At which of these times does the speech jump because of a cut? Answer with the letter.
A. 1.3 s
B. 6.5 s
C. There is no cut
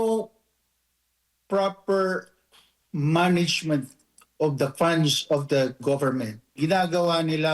B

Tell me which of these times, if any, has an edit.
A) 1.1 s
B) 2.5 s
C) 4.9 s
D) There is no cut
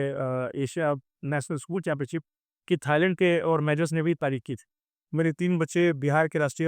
C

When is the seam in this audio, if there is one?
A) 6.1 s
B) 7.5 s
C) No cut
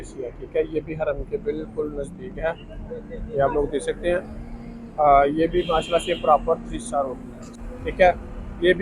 B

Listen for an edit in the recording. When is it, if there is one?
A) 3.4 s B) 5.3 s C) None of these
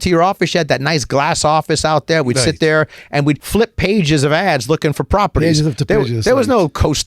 A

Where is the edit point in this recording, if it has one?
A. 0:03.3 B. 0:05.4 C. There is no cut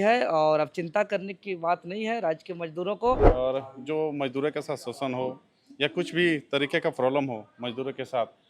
A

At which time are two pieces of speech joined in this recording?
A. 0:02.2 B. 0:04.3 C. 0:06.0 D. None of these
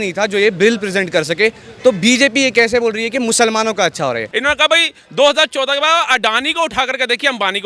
B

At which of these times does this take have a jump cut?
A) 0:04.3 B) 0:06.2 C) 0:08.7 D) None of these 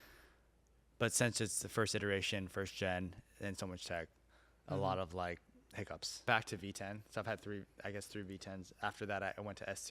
B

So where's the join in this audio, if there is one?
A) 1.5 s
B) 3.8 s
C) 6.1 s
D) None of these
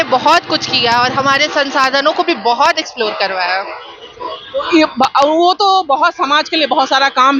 D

